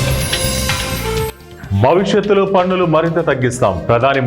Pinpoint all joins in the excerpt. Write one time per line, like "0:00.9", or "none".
0:01.5